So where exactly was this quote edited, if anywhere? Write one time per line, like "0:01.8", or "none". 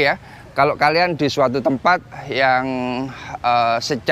none